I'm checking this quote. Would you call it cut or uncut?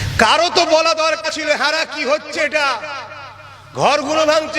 cut